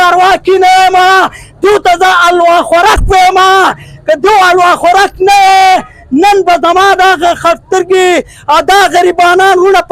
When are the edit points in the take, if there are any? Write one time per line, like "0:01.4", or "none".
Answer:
none